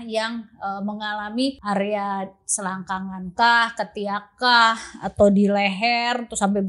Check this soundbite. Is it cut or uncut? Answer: cut